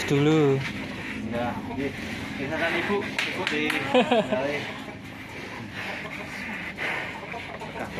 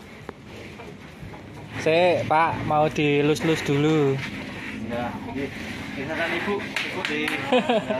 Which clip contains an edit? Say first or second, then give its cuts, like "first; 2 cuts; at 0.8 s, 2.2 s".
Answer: second; 1 cut; at 1.8 s